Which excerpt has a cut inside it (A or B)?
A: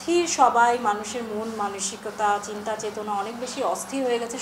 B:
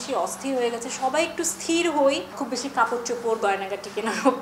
B